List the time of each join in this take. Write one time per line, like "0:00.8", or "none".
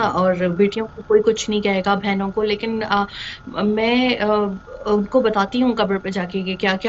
none